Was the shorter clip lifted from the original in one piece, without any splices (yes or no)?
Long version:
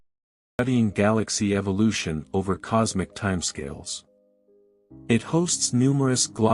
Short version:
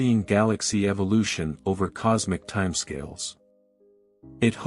yes